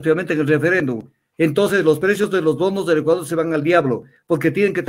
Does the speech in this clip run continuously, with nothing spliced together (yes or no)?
yes